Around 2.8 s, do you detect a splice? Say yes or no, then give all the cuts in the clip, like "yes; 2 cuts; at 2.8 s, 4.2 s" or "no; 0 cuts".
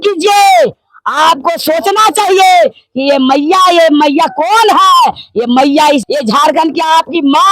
no; 1 cut; at 6.0 s